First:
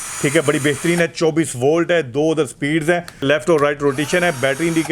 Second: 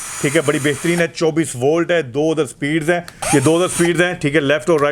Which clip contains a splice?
first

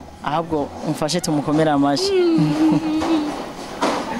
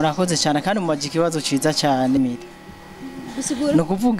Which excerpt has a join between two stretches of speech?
second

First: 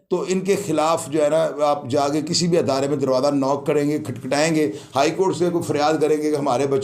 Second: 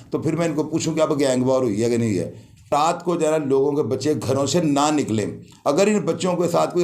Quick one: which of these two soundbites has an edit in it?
second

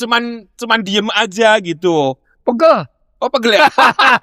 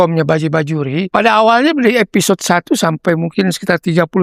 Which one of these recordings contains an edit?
second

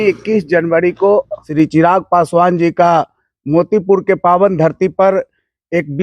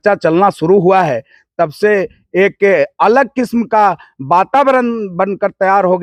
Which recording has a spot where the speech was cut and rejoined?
first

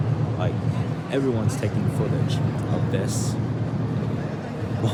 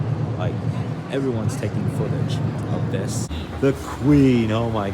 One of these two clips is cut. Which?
second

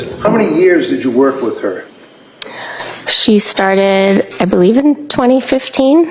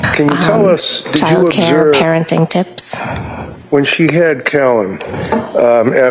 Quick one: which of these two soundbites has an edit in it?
second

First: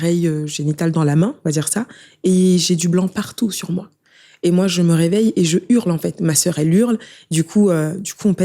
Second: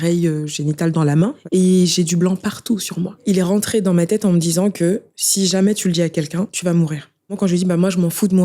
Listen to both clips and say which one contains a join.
second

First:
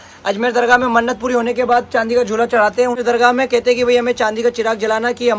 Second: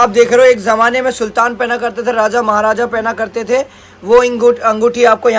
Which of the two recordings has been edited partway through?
first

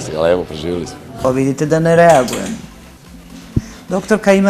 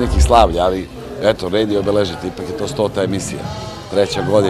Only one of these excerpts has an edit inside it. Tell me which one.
first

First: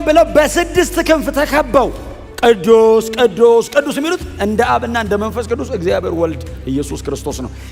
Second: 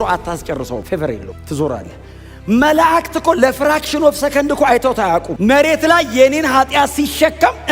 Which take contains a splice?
second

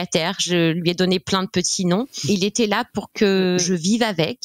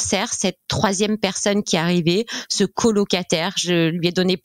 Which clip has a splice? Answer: first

